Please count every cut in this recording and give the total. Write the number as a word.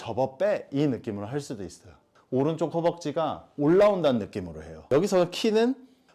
one